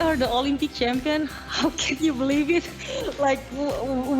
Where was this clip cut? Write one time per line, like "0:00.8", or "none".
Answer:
none